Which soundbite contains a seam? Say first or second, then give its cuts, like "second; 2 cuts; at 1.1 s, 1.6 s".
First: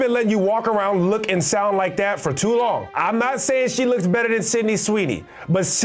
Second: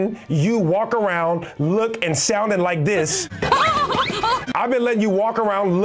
first; 1 cut; at 2.9 s